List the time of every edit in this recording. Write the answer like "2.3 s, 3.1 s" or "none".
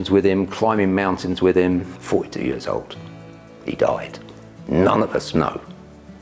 1.9 s